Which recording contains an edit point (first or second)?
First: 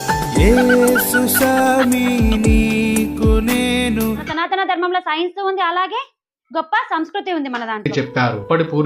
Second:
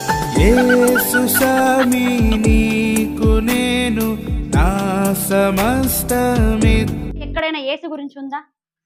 first